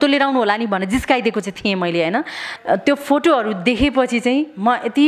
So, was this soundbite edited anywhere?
yes; 1 cut; at 2.5 s

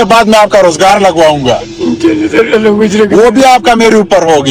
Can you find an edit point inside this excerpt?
no; 0 cuts

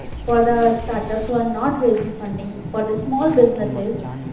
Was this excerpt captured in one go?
yes; 0 cuts

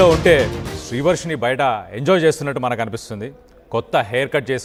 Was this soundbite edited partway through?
no; 0 cuts

